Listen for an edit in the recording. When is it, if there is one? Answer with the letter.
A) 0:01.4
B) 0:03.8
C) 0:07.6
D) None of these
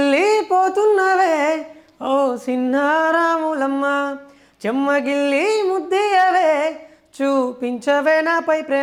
D